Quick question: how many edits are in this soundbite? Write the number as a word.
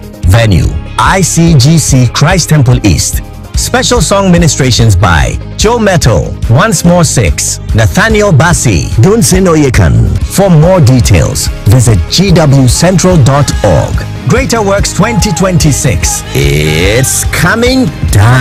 zero